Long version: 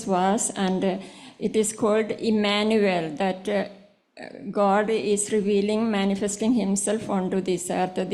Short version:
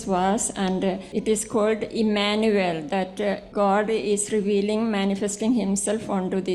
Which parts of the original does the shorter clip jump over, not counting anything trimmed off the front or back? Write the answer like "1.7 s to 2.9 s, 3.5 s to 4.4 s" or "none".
1.1 s to 1.4 s, 3.7 s to 4.5 s